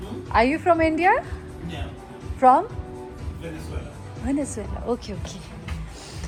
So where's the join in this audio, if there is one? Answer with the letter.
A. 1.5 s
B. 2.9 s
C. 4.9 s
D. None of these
D